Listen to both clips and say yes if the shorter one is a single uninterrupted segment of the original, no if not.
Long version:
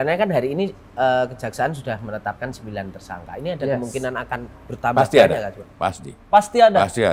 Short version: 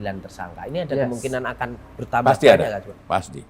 yes